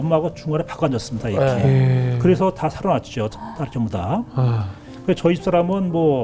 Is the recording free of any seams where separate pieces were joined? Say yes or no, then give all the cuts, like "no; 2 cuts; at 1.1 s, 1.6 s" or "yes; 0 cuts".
yes; 0 cuts